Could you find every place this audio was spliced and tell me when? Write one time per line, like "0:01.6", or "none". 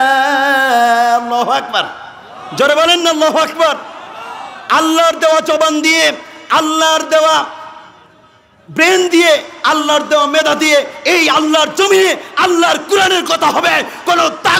none